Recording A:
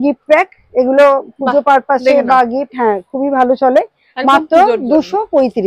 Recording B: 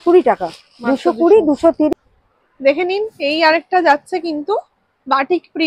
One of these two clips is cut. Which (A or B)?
B